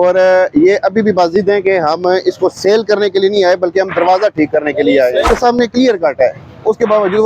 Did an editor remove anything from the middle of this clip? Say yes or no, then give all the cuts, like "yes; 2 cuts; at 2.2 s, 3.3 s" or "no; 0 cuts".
yes; 1 cut; at 5.3 s